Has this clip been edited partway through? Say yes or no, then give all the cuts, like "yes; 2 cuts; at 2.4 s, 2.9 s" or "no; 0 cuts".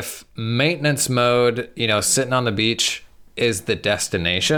no; 0 cuts